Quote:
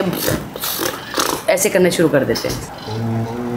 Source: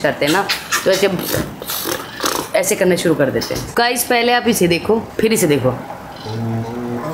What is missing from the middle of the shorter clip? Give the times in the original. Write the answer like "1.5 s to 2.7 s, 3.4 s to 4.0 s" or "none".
3.6 s to 5.9 s